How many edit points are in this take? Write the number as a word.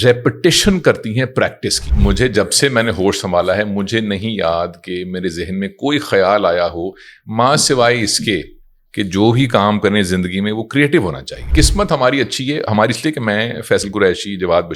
two